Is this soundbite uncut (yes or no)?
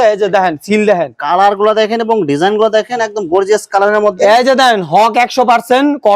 yes